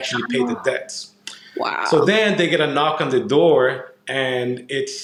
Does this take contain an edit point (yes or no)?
no